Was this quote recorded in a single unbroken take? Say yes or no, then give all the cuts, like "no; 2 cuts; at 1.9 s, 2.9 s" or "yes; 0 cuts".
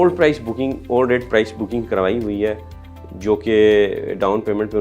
yes; 0 cuts